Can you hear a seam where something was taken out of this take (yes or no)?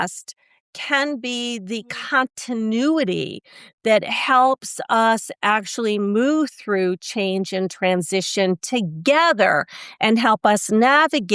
no